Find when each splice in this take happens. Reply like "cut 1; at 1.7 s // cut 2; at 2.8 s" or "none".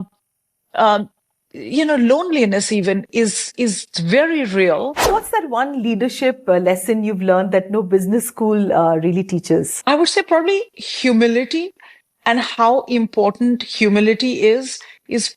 cut 1; at 5.1 s // cut 2; at 9.7 s